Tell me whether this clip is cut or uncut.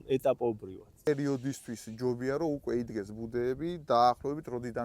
cut